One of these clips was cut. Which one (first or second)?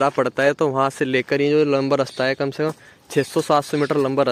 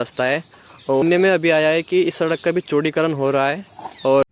second